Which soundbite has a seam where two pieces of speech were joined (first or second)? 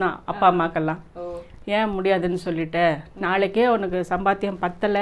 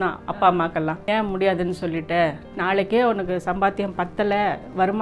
second